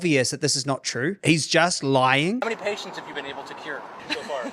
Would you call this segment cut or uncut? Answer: cut